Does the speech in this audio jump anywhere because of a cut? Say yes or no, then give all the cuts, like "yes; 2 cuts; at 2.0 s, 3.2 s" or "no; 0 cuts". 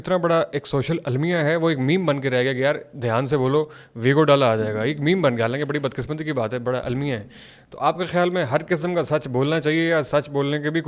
no; 0 cuts